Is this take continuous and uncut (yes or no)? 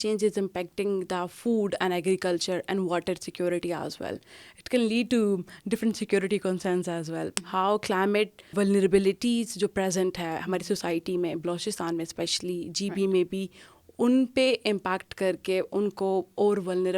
no